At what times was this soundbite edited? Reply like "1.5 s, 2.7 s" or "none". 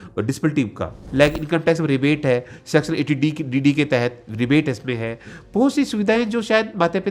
1.0 s